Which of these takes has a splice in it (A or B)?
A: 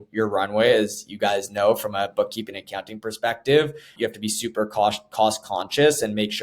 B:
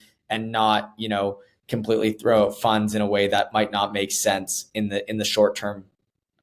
A